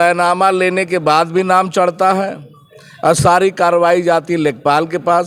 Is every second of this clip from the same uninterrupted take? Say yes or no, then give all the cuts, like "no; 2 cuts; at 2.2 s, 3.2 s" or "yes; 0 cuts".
yes; 0 cuts